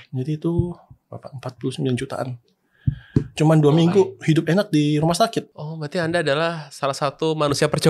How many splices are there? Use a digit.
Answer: 1